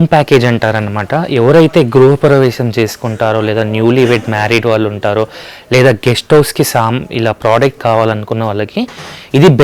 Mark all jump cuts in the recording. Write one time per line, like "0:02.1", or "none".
none